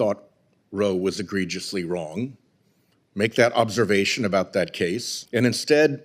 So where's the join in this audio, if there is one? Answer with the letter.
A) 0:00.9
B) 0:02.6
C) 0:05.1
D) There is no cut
C